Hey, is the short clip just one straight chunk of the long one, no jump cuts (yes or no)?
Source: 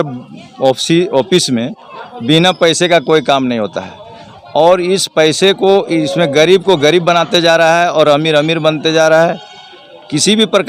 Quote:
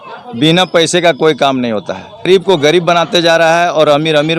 no